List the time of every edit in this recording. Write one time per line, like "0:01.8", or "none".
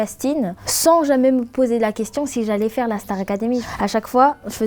none

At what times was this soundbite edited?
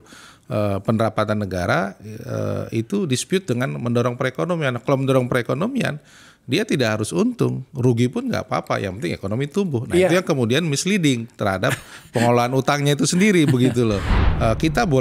0:14.1

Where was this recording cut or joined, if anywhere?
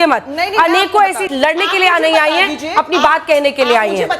0:01.2

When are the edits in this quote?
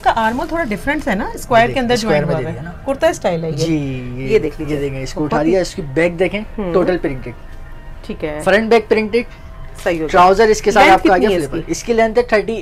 none

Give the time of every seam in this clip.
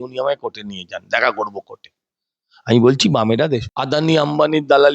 0:03.7

